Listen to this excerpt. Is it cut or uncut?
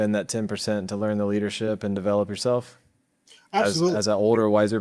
uncut